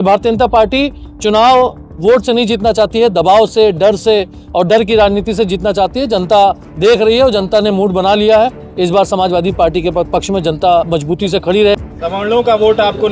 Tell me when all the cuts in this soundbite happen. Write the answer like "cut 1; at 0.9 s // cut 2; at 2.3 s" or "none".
cut 1; at 11.8 s